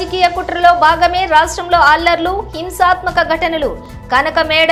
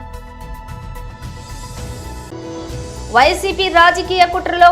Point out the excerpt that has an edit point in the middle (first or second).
second